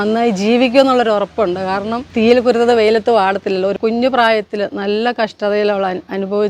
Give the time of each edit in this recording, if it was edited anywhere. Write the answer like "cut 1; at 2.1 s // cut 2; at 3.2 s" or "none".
cut 1; at 2.1 s // cut 2; at 3.8 s